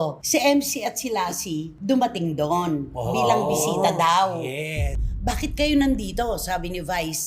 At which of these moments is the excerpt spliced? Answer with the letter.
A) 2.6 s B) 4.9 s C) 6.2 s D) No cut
B